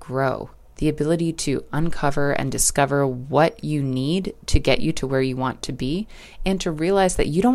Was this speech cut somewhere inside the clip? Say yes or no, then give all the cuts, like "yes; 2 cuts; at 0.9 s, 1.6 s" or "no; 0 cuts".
no; 0 cuts